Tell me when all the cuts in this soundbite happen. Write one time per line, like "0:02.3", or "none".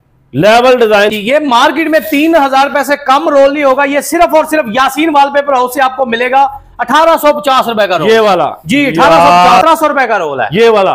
0:01.1
0:09.6